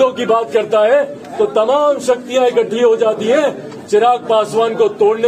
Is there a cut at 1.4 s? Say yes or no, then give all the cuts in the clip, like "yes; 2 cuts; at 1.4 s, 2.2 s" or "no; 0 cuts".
no; 0 cuts